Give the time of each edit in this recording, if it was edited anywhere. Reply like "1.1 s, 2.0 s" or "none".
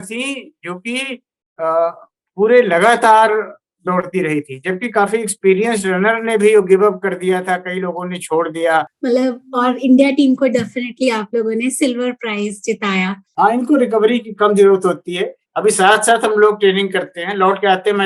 8.9 s, 13.2 s